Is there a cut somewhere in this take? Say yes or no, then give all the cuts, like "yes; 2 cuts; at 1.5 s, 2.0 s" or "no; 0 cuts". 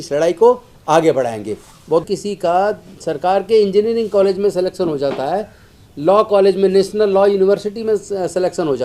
yes; 1 cut; at 2.0 s